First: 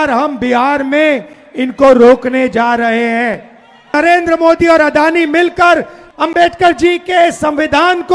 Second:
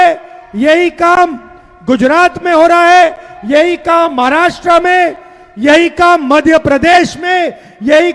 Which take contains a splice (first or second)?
first